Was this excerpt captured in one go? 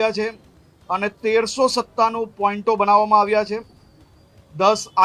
yes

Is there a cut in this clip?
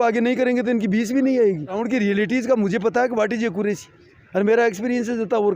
yes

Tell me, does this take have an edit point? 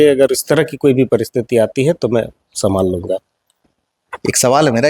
no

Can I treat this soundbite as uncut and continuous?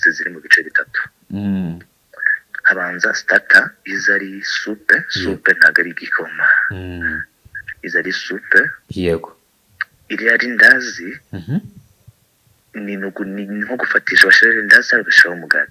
yes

